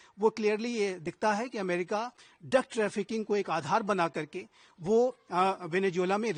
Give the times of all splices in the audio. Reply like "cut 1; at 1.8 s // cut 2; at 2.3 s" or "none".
none